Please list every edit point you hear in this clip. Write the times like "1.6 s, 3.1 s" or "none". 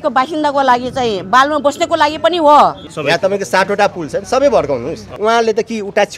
2.9 s, 5.1 s